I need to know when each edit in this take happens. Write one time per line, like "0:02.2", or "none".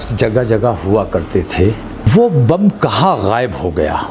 0:02.1